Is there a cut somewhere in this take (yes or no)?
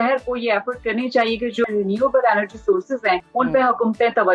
yes